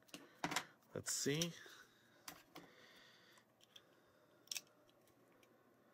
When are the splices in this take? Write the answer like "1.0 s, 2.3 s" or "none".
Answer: 3.9 s